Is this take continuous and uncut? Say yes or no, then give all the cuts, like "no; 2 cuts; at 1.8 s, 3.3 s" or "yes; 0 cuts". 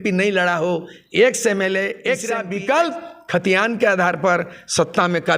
no; 1 cut; at 2.4 s